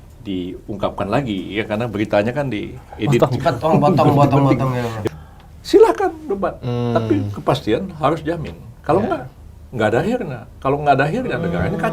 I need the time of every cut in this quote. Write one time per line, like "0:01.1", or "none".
0:05.0